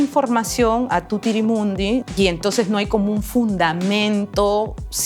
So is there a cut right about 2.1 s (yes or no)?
yes